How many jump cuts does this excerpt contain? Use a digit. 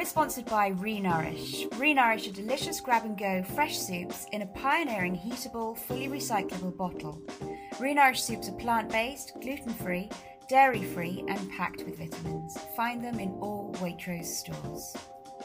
1